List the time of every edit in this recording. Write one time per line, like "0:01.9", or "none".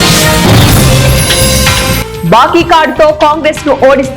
0:02.0